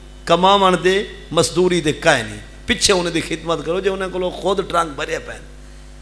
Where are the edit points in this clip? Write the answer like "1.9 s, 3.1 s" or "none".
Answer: none